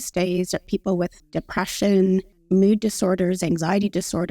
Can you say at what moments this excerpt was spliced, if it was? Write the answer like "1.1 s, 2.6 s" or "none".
1.2 s, 2.3 s